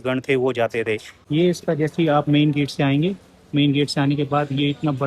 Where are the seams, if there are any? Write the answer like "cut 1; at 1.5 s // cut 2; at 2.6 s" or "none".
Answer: cut 1; at 1.1 s